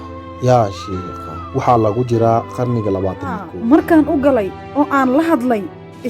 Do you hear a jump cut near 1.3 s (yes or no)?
no